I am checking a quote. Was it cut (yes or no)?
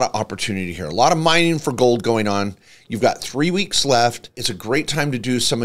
no